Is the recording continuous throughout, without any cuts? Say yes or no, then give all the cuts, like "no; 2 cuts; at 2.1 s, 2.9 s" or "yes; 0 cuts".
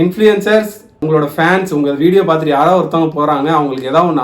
no; 1 cut; at 1.0 s